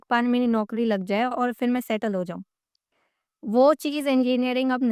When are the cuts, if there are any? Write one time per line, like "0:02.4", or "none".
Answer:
none